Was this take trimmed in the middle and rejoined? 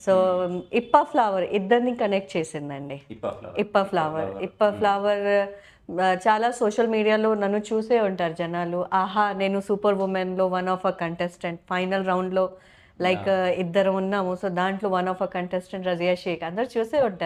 no; 0 cuts

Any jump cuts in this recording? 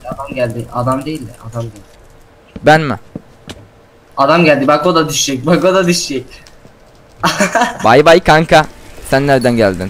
no; 0 cuts

